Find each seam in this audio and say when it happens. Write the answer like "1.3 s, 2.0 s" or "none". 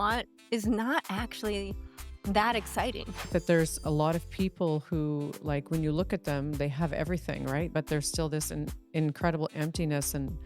3.2 s, 7.7 s